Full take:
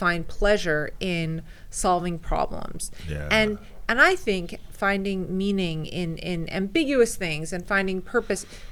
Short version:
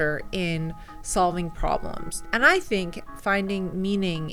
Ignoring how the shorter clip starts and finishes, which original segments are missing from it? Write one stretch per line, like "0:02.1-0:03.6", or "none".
0:02.9-0:03.7

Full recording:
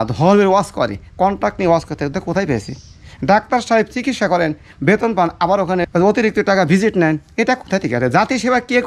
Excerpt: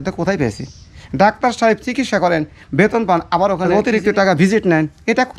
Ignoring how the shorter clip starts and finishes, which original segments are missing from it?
0:05.7-0:05.9

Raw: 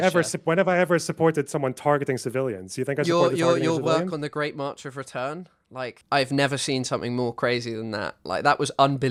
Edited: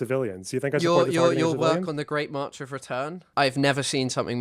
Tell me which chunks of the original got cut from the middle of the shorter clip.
0:05.5-0:06.0

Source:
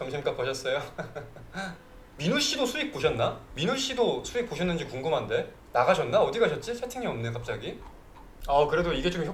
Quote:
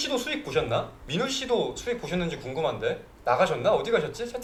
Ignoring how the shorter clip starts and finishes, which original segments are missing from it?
none

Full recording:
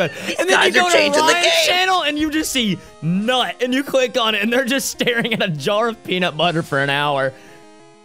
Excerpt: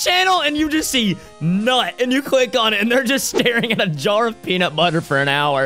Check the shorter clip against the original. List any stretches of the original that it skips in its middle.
none

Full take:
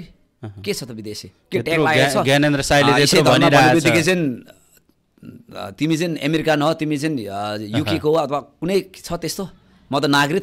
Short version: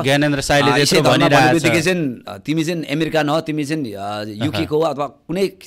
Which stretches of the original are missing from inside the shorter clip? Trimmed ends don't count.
0:04.5-0:05.6

